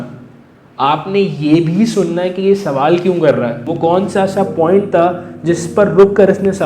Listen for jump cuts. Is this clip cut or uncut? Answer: cut